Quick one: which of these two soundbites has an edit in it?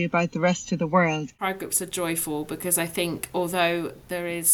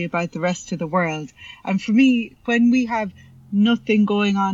first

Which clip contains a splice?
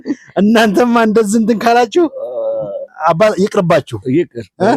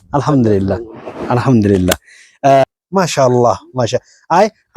second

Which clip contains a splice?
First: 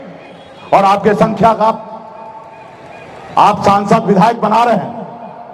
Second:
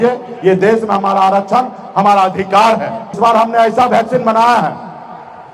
second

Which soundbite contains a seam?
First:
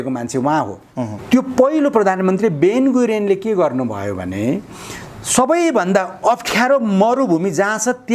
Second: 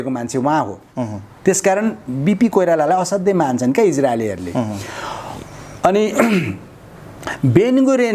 first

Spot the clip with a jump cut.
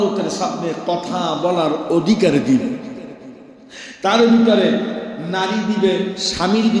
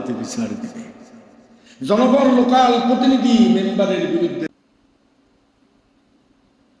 second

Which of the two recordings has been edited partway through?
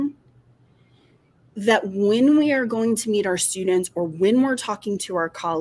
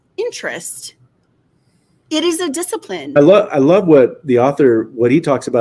second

